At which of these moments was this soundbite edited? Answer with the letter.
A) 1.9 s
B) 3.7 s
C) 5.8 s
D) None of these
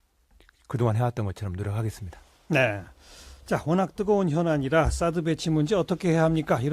B